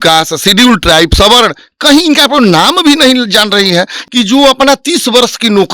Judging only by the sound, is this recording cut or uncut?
cut